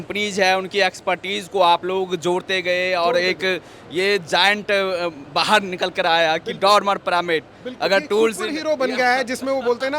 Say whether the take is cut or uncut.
cut